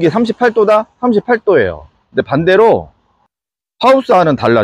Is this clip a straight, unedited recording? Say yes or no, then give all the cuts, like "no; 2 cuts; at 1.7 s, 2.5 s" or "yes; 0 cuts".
yes; 0 cuts